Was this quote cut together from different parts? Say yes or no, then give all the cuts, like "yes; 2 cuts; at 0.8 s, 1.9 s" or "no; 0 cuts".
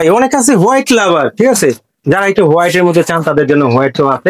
no; 0 cuts